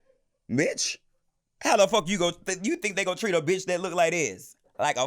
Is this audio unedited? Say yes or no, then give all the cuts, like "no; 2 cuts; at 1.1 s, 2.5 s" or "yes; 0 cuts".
yes; 0 cuts